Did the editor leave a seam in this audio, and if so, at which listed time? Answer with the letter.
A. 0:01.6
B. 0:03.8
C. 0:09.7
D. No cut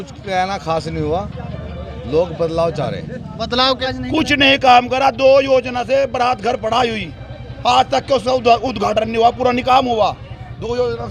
B